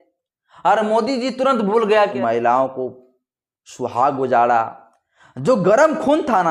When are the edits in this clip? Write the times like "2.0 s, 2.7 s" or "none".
2.1 s

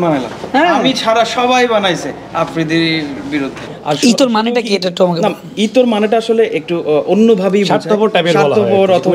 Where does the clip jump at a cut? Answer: 3.7 s

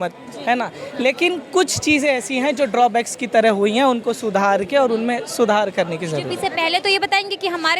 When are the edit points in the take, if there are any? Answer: 6.4 s

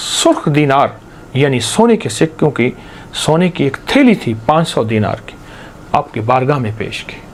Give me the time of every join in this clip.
none

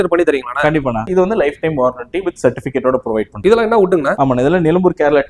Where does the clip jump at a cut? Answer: 1.1 s, 3.3 s, 4.1 s

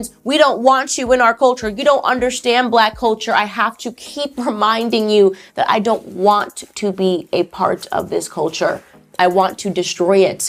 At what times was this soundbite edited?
none

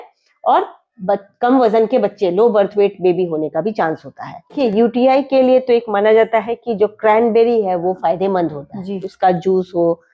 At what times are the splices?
4.6 s

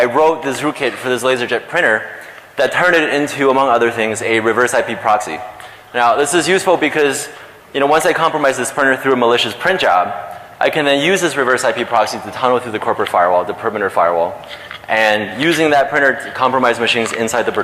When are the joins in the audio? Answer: 14.3 s

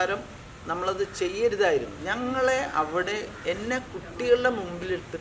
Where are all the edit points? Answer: 2.0 s

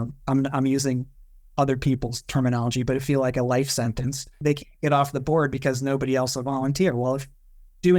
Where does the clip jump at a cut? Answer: 4.4 s

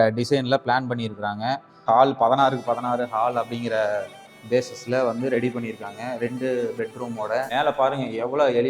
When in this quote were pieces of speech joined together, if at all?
1.7 s, 7.5 s

